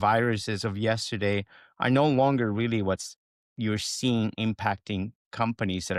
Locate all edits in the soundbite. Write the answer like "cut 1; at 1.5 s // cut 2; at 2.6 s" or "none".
none